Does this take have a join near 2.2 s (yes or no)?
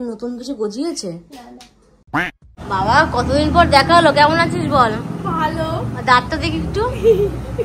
yes